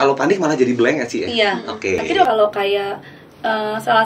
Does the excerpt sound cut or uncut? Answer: cut